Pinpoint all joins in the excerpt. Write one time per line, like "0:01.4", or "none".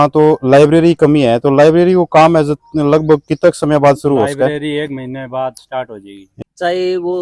0:06.2